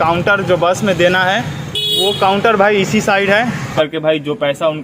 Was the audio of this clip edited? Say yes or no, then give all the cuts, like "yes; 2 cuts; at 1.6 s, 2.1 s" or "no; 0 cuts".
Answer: yes; 1 cut; at 3.7 s